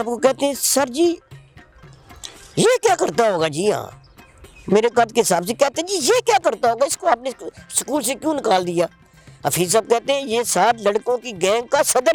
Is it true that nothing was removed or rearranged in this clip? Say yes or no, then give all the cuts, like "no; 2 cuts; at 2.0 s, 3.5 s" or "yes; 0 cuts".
yes; 0 cuts